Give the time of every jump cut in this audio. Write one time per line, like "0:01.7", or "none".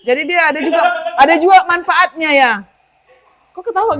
none